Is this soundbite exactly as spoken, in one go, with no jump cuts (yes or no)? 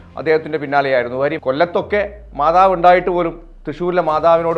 no